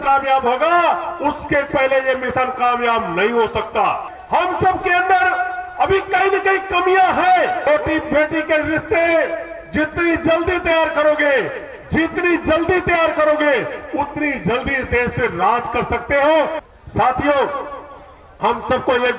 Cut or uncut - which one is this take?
cut